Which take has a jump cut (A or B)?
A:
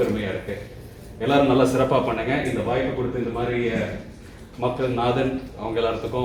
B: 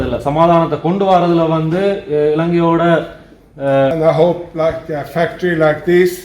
B